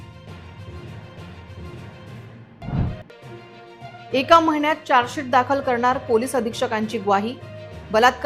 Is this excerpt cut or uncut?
uncut